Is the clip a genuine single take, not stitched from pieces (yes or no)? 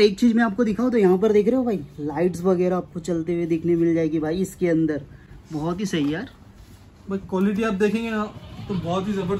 yes